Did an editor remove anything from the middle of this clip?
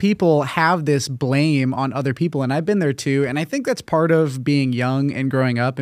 no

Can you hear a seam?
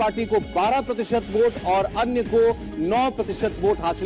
yes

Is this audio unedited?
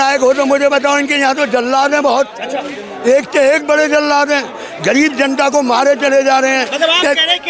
yes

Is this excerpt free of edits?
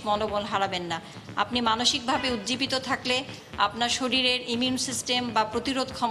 yes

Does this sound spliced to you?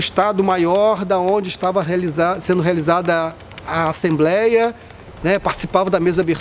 no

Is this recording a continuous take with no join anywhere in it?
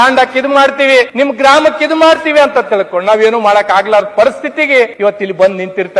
no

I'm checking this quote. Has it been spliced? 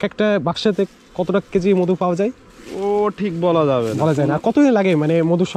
no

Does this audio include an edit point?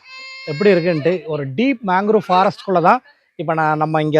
no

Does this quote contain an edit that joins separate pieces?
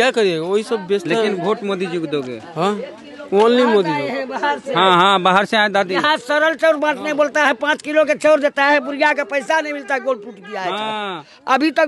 no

